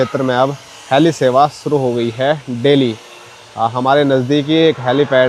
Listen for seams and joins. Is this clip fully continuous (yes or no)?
yes